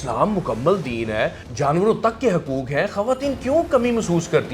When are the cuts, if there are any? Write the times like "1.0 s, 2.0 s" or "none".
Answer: 1.4 s